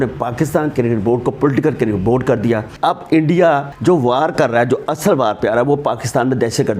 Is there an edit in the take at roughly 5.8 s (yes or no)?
no